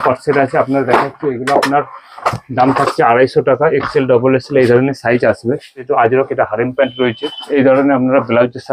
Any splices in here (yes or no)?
yes